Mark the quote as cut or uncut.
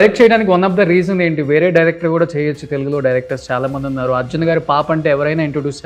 uncut